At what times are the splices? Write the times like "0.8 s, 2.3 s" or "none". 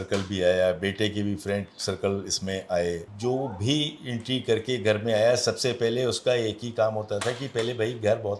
none